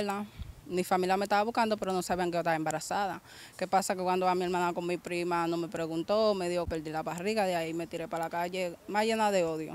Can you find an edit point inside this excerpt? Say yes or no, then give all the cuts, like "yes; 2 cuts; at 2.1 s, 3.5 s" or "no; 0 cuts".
yes; 1 cut; at 6.7 s